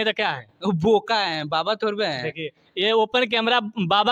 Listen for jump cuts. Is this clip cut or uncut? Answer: uncut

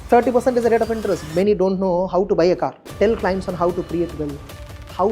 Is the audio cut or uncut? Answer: cut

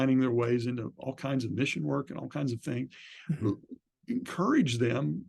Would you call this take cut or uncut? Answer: uncut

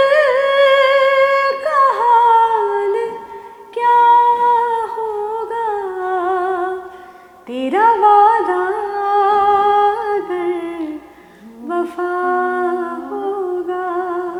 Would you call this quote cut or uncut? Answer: uncut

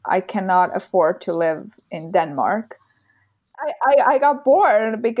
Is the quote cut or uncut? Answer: cut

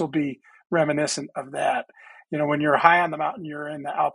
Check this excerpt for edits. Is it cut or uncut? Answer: uncut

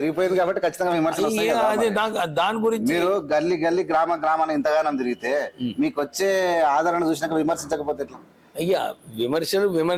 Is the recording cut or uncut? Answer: uncut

